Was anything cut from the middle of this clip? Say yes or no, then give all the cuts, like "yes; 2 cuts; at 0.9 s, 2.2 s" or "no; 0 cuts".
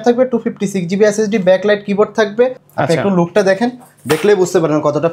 yes; 1 cut; at 2.7 s